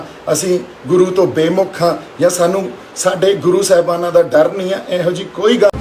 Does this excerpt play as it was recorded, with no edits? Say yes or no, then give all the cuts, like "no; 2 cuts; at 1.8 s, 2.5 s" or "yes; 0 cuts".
yes; 0 cuts